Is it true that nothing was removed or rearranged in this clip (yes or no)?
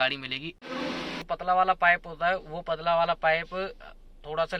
no